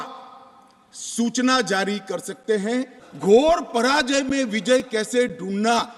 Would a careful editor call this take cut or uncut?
cut